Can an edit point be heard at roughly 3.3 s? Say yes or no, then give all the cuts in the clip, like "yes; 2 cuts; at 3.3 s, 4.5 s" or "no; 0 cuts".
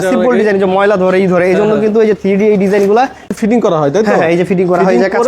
yes; 1 cut; at 3.3 s